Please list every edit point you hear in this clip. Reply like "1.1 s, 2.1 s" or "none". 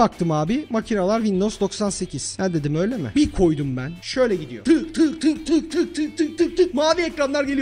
3.1 s, 4.5 s